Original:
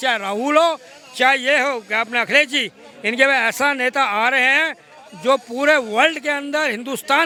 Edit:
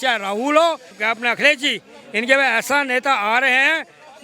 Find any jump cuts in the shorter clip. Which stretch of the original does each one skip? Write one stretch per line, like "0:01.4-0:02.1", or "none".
0:01.0-0:01.9